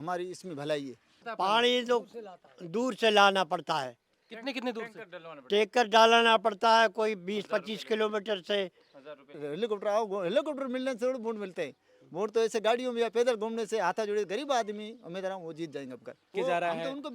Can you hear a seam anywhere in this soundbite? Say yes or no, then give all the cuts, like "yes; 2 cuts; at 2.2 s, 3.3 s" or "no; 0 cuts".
yes; 3 cuts; at 1.2 s, 9.4 s, 16.3 s